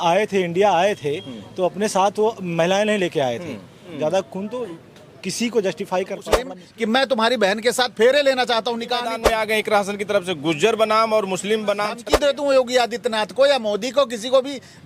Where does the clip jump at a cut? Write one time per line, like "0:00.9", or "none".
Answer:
0:03.8
0:06.6
0:09.1
0:12.0